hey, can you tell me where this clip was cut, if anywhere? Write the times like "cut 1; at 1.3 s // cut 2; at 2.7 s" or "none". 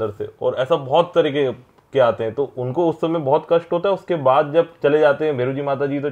none